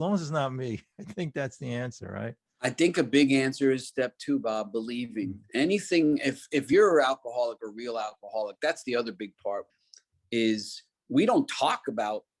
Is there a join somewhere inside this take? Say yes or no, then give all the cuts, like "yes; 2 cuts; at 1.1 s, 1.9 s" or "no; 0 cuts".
yes; 1 cut; at 9.8 s